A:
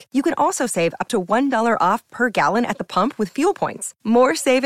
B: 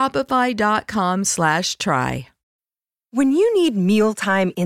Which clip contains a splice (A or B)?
B